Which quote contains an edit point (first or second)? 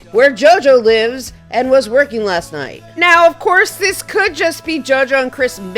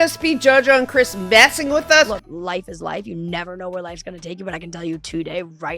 second